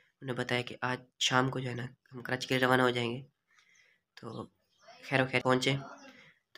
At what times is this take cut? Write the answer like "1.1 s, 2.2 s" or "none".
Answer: 5.4 s

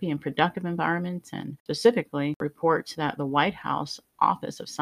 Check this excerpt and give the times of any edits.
1.6 s, 2.4 s

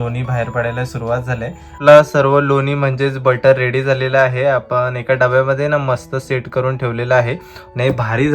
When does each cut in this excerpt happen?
1.8 s

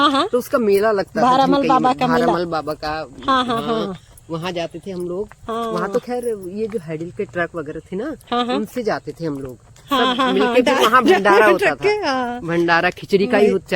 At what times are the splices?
none

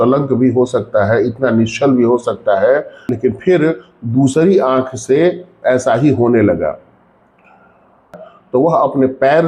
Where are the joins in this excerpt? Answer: 3.1 s, 8.3 s

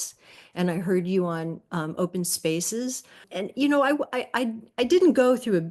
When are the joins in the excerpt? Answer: 3.3 s

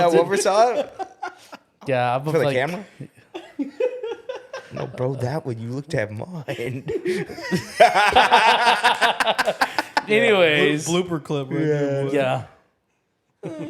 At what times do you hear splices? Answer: none

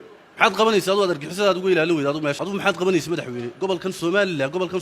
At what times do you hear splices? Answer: 2.4 s

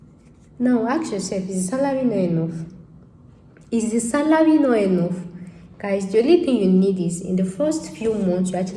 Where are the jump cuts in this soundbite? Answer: none

